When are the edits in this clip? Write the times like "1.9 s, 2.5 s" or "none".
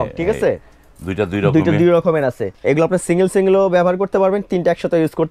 2.5 s